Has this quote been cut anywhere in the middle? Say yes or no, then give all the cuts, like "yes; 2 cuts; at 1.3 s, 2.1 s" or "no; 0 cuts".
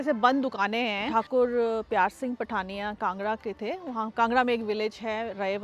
yes; 1 cut; at 1.0 s